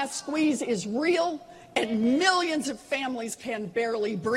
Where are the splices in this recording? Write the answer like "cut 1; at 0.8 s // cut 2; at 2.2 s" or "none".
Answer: cut 1; at 1.1 s